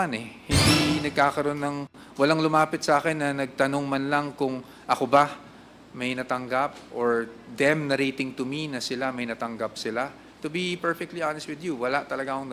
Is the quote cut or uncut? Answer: uncut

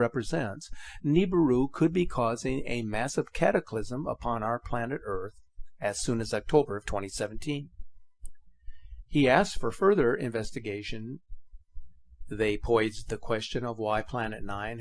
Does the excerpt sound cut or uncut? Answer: uncut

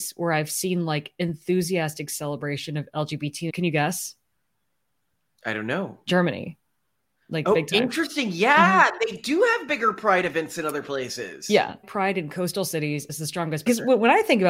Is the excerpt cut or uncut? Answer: cut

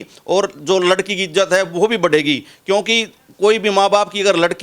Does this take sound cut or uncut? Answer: uncut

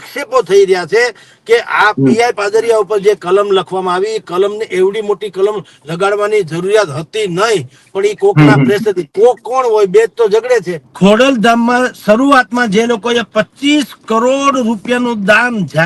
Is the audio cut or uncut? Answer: cut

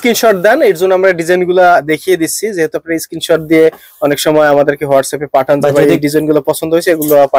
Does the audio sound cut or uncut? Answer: uncut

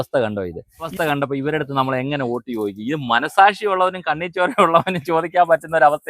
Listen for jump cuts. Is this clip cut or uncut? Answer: cut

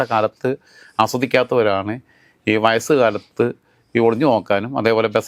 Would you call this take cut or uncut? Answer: uncut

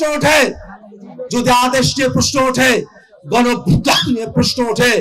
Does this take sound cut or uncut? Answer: uncut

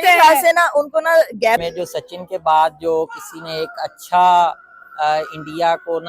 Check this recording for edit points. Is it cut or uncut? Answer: cut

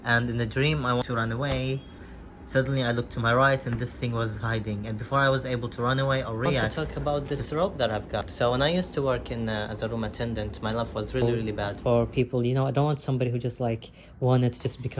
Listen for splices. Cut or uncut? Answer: cut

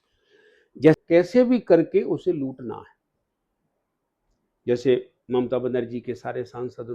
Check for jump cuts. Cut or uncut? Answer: cut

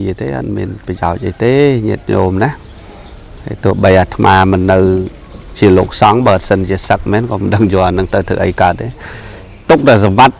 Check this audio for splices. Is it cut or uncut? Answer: uncut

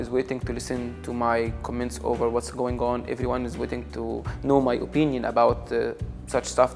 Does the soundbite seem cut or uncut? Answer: uncut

